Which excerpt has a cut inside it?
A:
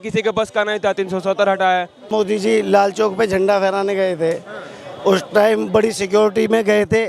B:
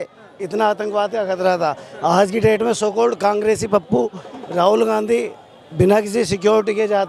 A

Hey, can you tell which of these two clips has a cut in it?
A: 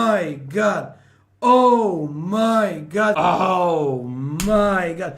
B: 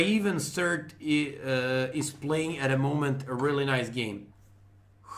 A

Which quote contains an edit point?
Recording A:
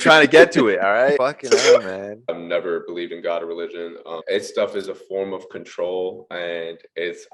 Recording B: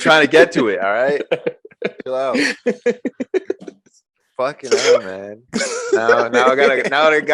A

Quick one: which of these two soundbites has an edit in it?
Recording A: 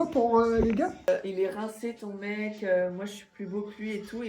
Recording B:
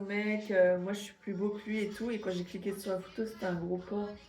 A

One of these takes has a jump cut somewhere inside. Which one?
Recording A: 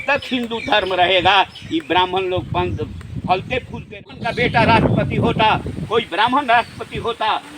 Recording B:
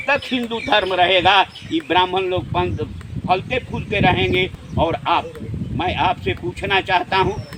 A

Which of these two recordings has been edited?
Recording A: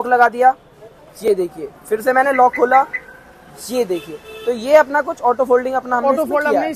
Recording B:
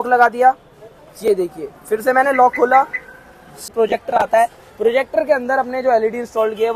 B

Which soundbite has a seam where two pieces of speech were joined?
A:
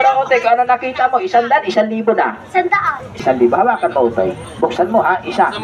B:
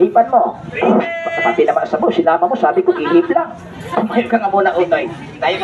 A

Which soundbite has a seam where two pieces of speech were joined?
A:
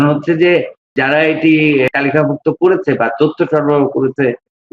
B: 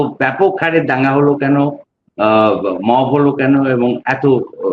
A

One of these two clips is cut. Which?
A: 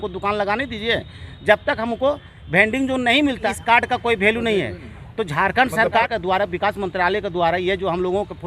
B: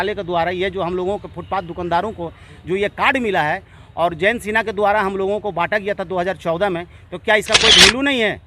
A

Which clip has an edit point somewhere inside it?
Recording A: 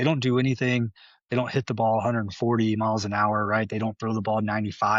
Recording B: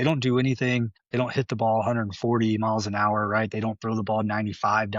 B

